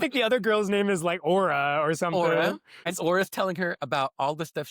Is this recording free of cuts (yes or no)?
no